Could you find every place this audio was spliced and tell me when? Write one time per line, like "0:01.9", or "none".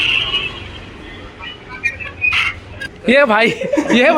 0:02.9